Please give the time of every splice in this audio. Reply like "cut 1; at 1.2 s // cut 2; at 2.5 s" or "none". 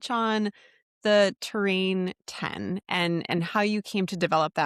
none